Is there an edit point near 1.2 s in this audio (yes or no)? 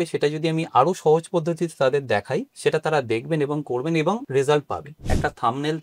no